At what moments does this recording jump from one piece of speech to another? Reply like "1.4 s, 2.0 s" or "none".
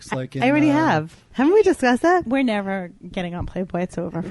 1.2 s